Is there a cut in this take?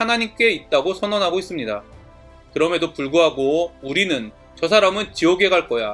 no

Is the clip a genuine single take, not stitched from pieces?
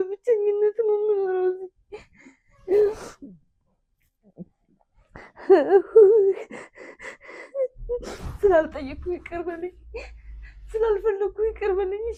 yes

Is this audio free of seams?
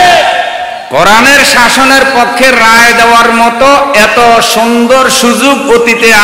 yes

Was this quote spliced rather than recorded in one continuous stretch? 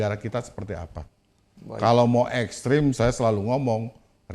no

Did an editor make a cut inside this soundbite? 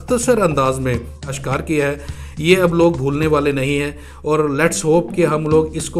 yes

